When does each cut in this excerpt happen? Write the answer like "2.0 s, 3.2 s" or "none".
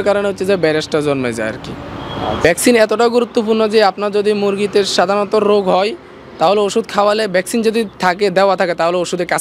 2.4 s